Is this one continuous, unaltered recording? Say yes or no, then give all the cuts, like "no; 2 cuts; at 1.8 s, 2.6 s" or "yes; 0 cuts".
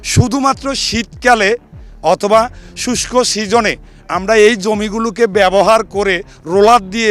yes; 0 cuts